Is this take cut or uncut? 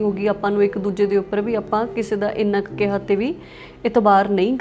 uncut